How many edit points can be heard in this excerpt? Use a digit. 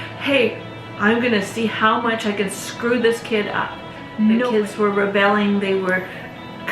1